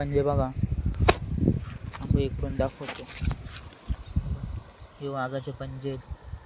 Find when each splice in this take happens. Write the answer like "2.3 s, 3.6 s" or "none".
none